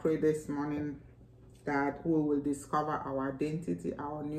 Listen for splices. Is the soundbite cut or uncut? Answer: uncut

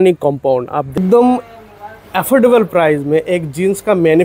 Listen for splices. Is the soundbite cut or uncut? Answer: cut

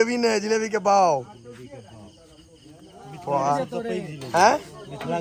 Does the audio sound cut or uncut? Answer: uncut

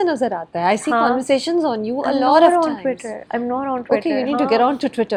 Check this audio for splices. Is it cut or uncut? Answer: uncut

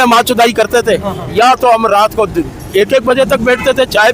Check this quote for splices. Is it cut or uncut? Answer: uncut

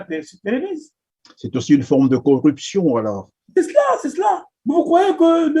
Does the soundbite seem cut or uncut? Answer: cut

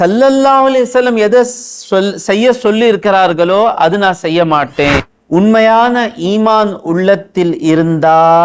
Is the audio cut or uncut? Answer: cut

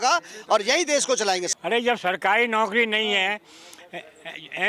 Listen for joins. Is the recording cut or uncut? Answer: cut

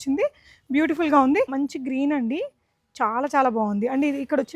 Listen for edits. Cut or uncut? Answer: cut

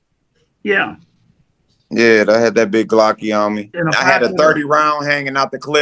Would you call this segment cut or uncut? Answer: cut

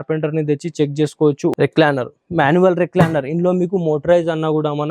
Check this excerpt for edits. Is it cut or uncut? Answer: cut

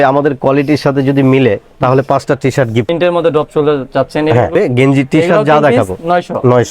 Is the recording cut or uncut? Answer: cut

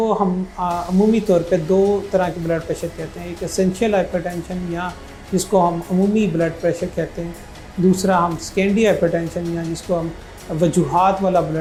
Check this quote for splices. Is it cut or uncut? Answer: uncut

